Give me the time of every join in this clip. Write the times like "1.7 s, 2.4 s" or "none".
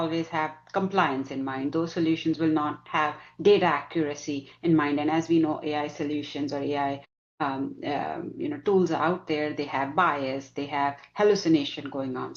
none